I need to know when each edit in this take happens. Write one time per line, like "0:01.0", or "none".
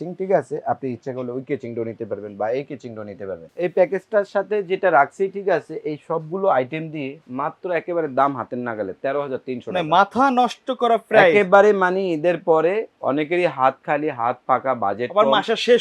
0:03.4